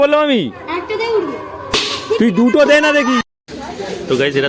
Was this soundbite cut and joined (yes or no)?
yes